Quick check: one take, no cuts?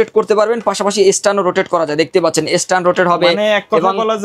yes; 0 cuts

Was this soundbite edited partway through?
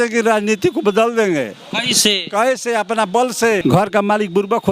yes; 1 cut; at 3.6 s

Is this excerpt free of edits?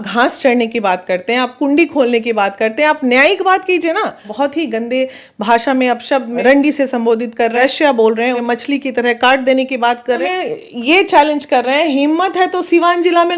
no; 5 cuts; at 4.3 s, 6.4 s, 7.5 s, 8.4 s, 10.2 s

